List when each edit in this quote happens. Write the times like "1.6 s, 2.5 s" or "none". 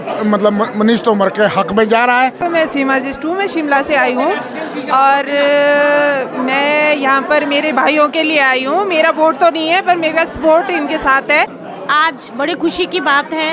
2.4 s, 11.5 s